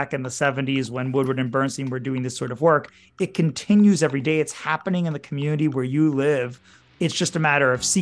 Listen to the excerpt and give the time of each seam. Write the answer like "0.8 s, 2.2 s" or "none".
6.8 s

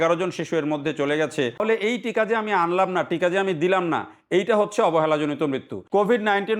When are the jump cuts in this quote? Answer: 1.6 s, 5.7 s

